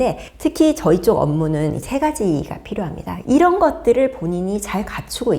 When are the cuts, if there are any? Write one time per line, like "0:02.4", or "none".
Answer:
0:03.1